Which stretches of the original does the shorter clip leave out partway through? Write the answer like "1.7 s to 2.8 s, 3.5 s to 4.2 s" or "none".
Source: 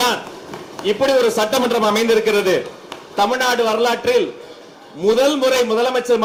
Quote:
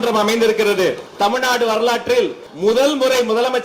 2.7 s to 3.0 s, 4.4 s to 4.9 s